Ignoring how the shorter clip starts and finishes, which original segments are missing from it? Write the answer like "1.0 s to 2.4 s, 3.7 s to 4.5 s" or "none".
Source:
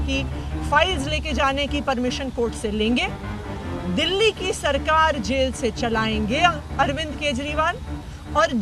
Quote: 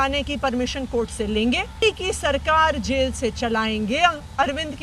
3.3 s to 4.2 s